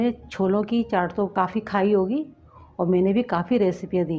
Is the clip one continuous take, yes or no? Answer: no